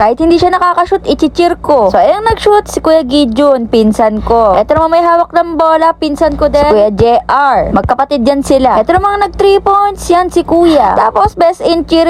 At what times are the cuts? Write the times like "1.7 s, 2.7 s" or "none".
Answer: none